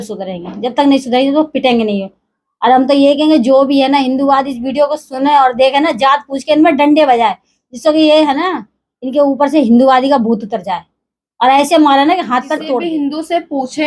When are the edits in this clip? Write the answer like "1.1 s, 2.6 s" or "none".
12.8 s